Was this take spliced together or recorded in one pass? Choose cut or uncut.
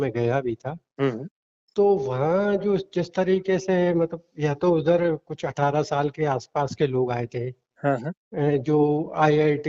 uncut